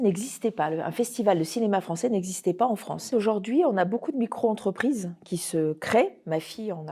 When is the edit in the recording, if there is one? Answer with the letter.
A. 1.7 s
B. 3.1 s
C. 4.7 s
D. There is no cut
B